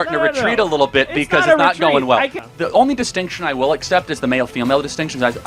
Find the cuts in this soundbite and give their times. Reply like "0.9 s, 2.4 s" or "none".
2.4 s